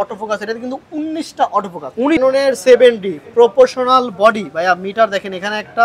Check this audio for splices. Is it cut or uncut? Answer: cut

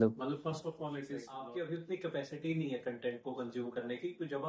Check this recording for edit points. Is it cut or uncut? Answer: cut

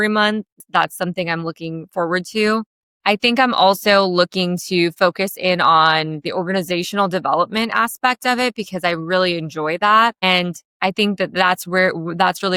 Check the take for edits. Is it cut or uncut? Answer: uncut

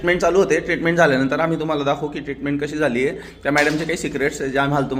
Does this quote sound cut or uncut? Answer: uncut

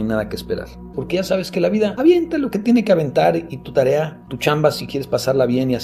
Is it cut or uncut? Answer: cut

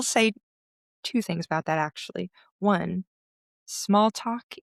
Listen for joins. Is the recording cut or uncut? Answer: uncut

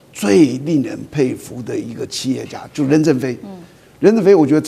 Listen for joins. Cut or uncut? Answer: uncut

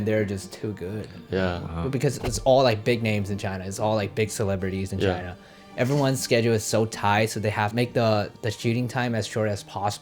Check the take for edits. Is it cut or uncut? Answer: cut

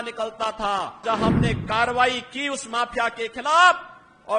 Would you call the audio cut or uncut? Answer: cut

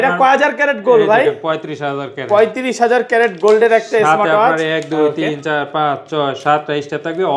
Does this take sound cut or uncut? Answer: uncut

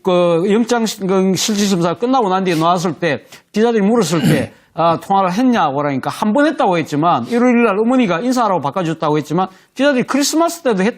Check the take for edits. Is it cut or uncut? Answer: cut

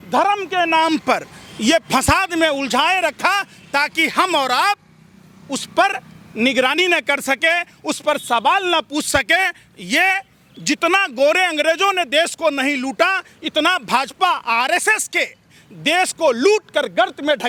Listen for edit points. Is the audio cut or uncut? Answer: uncut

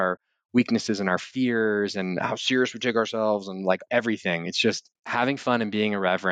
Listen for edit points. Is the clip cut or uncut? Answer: uncut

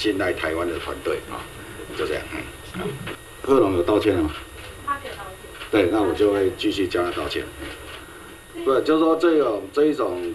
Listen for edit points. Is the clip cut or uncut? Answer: cut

